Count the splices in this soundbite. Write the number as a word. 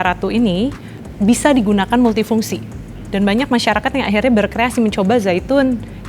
one